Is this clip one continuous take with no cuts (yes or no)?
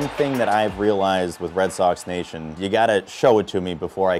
no